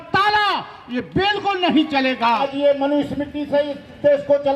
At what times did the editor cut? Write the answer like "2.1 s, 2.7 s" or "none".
2.5 s